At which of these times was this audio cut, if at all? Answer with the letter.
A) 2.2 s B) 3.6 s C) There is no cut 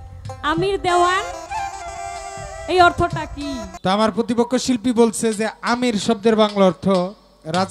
B